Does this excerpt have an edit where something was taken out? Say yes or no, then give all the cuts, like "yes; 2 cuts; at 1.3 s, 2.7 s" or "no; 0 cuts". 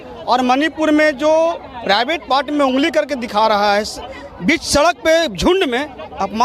no; 0 cuts